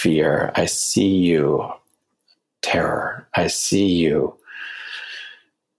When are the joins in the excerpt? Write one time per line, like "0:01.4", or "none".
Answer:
none